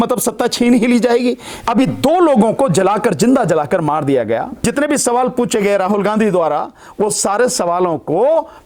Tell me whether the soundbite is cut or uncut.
cut